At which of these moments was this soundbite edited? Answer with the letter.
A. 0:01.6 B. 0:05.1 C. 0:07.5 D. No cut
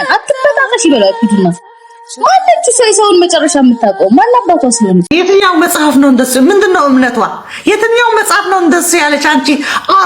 B